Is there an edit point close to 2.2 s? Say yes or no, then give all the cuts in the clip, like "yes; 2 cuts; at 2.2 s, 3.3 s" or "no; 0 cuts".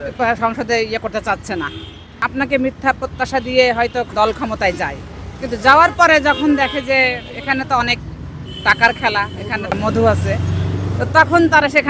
yes; 1 cut; at 2.2 s